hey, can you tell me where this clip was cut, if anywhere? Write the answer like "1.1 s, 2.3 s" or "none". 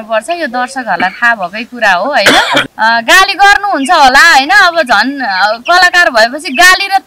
2.7 s